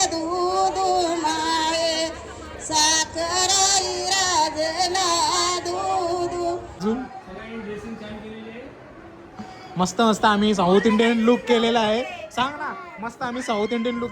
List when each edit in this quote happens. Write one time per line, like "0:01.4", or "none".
0:06.8